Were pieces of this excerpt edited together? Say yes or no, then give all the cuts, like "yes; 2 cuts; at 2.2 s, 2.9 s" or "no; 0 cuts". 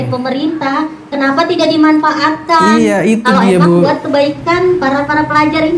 no; 0 cuts